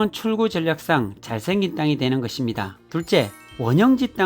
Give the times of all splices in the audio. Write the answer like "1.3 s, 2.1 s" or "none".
2.8 s